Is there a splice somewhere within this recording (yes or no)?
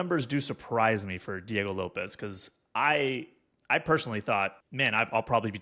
yes